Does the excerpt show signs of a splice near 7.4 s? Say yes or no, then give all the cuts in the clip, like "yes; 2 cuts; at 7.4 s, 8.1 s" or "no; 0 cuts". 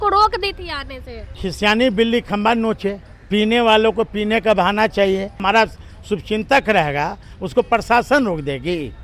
no; 2 cuts; at 1.4 s, 5.4 s